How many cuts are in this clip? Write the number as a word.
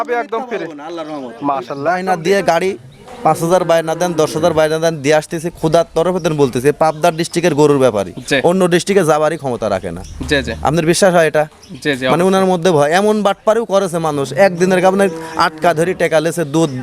one